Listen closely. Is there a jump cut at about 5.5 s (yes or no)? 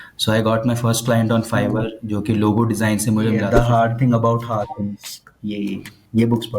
no